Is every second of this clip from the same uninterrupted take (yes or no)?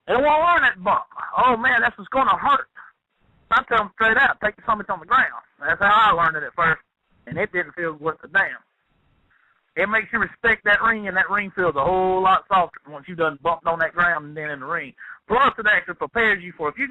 no